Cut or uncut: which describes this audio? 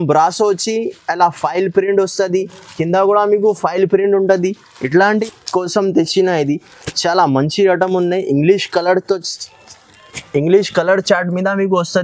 cut